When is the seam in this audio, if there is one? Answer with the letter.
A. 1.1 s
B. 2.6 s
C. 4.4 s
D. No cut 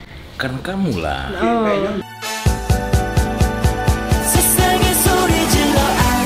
D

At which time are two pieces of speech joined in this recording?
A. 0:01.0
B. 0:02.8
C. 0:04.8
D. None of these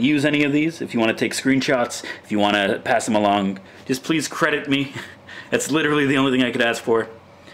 C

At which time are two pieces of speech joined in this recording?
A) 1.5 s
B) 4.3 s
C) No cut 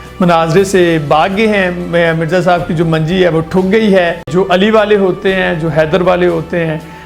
B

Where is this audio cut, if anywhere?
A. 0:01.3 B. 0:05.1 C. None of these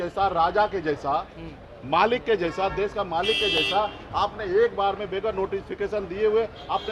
C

